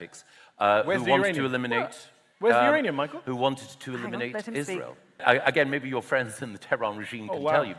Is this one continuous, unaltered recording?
no; 1 cut; at 5.2 s

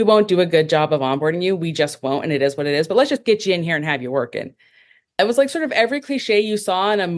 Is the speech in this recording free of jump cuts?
no; 1 cut; at 5.2 s

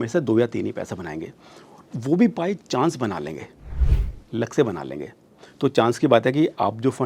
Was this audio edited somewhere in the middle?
no; 0 cuts

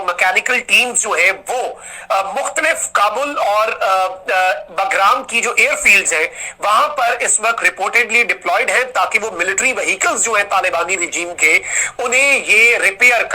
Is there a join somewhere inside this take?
no; 0 cuts

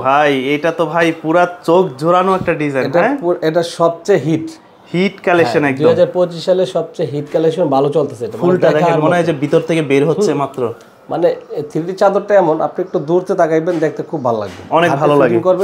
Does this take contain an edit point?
no; 0 cuts

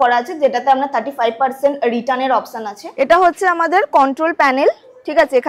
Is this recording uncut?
no; 1 cut; at 2.8 s

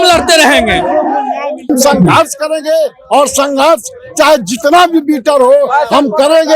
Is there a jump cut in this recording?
yes; 1 cut; at 1.7 s

